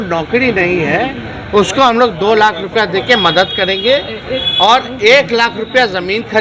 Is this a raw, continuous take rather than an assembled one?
yes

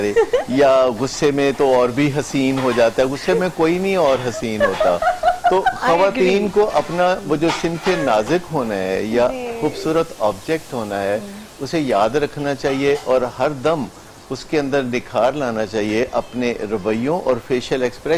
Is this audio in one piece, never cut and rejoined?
yes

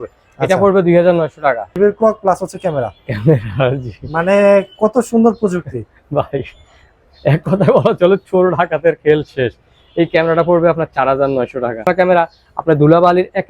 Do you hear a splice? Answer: yes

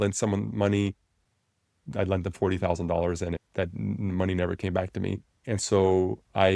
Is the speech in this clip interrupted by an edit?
yes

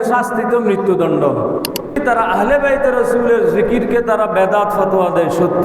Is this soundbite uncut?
no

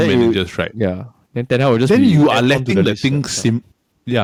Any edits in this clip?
no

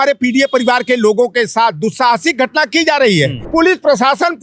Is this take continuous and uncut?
no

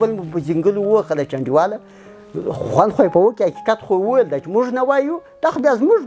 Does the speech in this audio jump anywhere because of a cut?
no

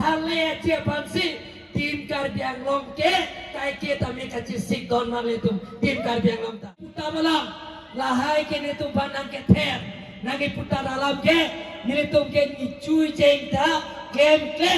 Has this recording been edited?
yes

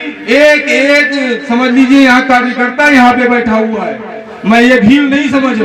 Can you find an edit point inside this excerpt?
no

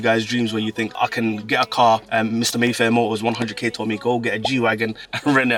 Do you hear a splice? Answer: no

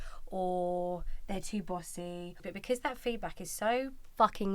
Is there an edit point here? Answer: yes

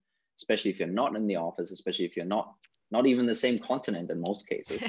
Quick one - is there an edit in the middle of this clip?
no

